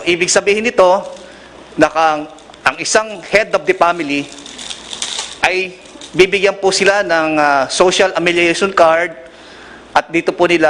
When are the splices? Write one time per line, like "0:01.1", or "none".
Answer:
none